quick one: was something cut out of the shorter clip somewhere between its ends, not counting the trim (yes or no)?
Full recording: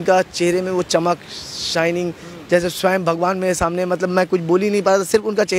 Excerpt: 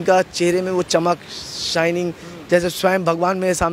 no